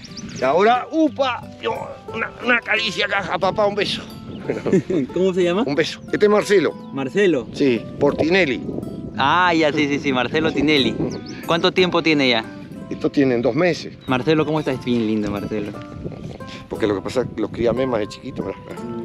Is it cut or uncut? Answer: uncut